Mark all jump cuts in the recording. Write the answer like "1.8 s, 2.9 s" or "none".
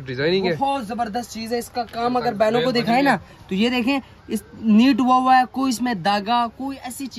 none